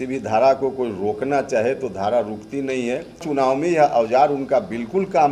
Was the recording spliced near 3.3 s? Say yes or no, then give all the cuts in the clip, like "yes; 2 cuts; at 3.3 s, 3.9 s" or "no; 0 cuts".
yes; 1 cut; at 3.3 s